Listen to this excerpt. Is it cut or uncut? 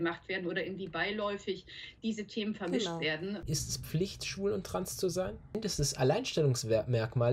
cut